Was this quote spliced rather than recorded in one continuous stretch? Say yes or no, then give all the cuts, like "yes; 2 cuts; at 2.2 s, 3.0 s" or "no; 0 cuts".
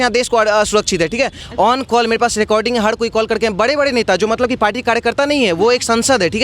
yes; 1 cut; at 1.4 s